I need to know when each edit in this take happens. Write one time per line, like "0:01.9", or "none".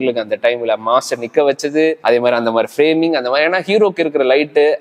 none